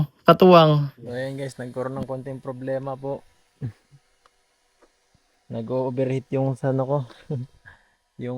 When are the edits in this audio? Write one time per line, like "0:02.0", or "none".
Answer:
0:01.0